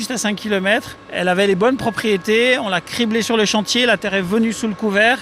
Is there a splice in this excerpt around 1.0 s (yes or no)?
yes